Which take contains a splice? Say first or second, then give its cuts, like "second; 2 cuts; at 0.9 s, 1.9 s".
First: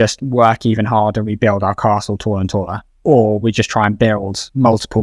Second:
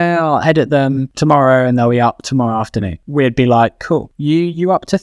second; 3 cuts; at 1.1 s, 3.0 s, 4.1 s